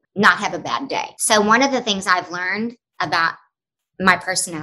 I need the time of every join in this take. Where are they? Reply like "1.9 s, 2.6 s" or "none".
1.1 s